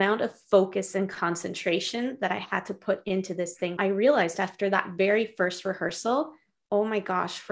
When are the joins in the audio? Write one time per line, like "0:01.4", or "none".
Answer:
0:03.7